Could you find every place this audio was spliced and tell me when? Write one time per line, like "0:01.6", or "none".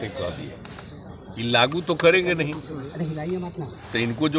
none